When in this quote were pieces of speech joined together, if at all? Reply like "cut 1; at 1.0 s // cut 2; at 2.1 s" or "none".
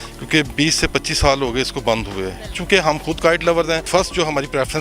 cut 1; at 2.5 s // cut 2; at 3.9 s